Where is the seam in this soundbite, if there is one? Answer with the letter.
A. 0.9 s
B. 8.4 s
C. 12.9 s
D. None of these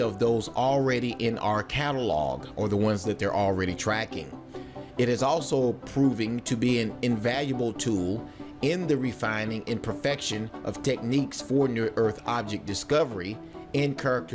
A